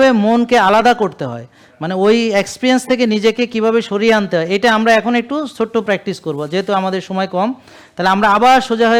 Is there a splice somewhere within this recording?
no; 0 cuts

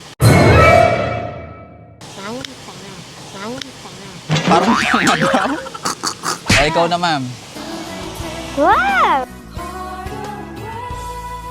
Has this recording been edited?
yes; 1 cut; at 5.9 s

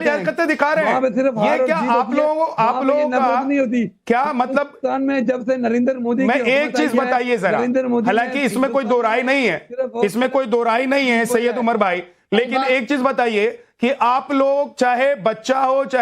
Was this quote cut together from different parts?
no; 0 cuts

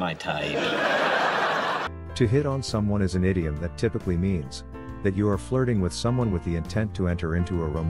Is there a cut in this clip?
no; 0 cuts

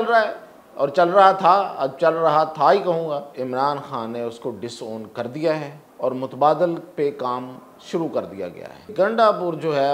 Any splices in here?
yes; 3 cuts; at 3.3 s, 5.8 s, 8.9 s

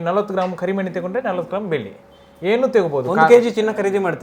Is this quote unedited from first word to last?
yes; 0 cuts

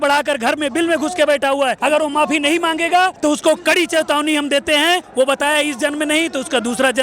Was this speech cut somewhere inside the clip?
yes; 3 cuts; at 1.8 s, 3.1 s, 5.1 s

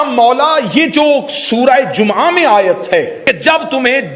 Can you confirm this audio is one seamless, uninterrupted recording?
no; 1 cut; at 3.2 s

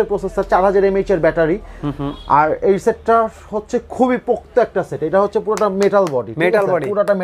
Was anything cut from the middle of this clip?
no; 0 cuts

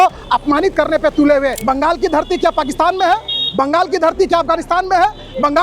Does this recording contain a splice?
yes; 1 cut; at 1.6 s

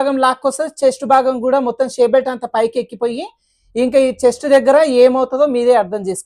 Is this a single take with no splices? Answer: yes; 0 cuts

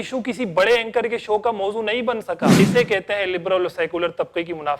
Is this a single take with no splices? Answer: no; 1 cut; at 2.5 s

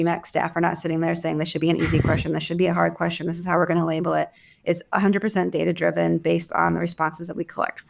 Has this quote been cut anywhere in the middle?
no; 0 cuts

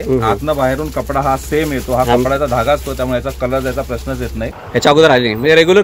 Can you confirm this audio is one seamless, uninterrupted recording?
no; 1 cut; at 4.5 s

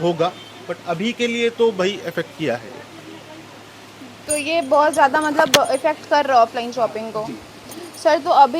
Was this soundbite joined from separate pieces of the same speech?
no; 0 cuts

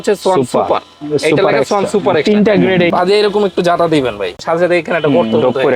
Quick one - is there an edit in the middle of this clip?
yes; 2 cuts; at 2.9 s, 4.4 s

